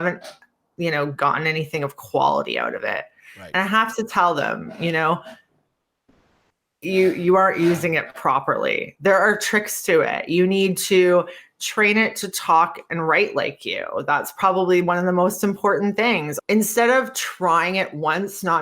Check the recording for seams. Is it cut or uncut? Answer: cut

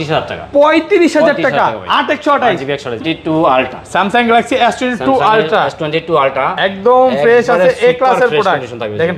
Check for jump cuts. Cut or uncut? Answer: cut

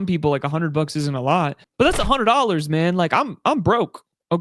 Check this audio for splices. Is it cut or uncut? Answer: uncut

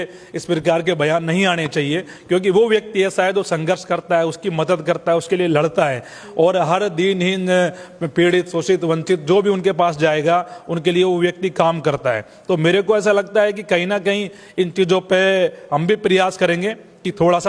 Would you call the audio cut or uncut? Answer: uncut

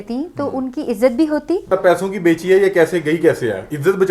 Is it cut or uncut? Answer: cut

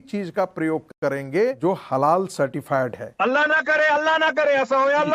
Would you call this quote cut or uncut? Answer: cut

